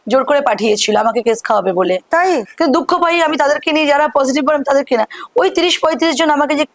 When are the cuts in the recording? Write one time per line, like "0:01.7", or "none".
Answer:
0:02.4